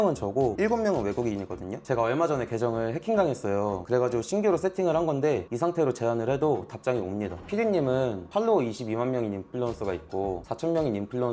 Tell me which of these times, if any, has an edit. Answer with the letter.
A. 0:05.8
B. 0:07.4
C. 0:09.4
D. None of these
B